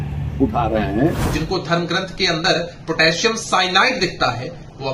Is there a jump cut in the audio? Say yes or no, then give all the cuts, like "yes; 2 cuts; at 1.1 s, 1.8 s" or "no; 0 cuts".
yes; 1 cut; at 1.2 s